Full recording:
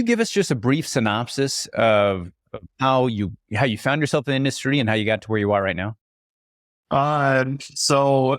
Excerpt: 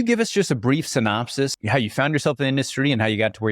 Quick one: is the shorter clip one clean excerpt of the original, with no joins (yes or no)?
no